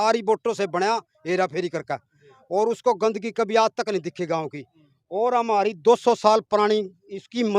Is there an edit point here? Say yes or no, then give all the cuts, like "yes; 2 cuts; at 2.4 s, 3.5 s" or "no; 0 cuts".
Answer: no; 0 cuts